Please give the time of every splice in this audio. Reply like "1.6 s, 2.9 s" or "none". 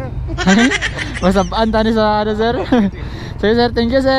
none